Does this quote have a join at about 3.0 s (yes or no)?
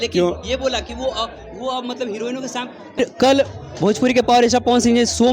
yes